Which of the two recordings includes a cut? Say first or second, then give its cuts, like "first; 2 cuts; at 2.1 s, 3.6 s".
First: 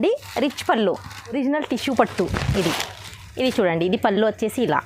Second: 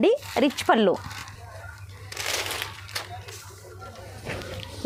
first; 1 cut; at 1.3 s